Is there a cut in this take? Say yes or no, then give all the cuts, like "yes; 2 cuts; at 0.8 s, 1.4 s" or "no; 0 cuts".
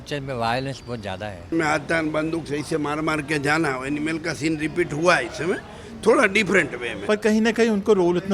yes; 2 cuts; at 1.5 s, 6.9 s